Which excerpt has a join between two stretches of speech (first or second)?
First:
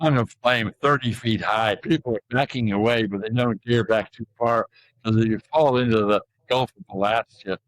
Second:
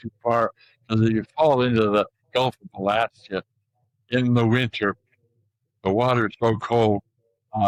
first